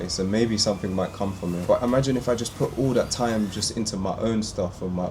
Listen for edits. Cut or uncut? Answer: cut